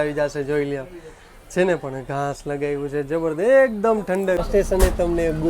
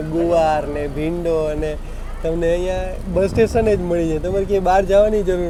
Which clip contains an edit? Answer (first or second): first